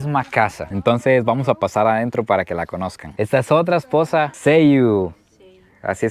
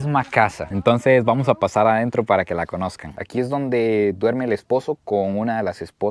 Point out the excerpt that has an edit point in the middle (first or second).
second